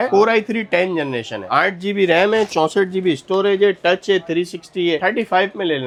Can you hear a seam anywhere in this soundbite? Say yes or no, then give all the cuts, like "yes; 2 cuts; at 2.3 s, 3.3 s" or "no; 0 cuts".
no; 0 cuts